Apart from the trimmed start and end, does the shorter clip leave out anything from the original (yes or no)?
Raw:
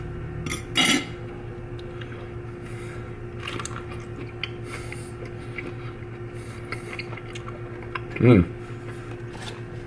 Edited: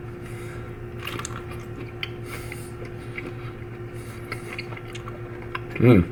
no